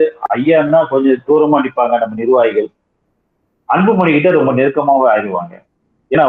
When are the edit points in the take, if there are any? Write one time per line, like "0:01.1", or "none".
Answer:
none